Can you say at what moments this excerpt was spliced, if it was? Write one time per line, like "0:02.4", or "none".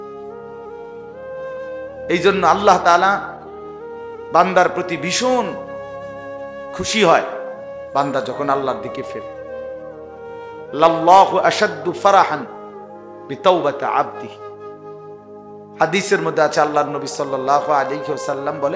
none